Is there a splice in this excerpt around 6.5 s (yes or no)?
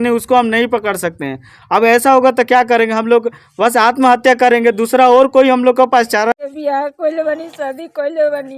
yes